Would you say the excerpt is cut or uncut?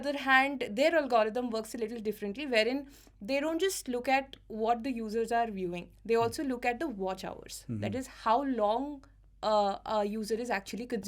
uncut